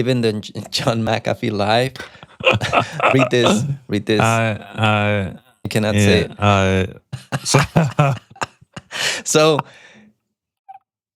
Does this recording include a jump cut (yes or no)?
no